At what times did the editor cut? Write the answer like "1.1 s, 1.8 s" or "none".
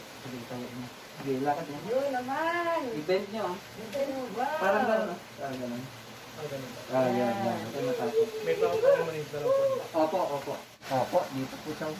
10.6 s